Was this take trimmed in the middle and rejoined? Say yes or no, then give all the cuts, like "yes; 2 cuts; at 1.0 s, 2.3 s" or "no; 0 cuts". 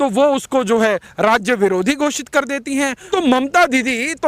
yes; 1 cut; at 3.1 s